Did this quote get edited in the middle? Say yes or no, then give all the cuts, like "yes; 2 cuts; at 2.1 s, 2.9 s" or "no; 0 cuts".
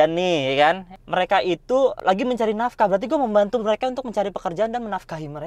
yes; 1 cut; at 0.9 s